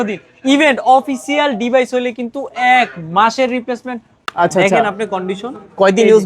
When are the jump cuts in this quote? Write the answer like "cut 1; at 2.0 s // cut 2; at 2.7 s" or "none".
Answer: cut 1; at 4.2 s